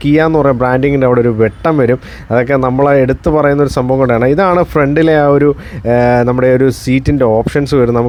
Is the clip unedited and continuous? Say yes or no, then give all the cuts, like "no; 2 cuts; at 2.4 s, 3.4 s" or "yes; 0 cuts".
yes; 0 cuts